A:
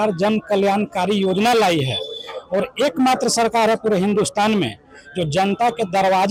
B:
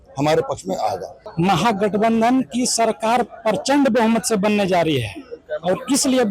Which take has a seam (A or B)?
B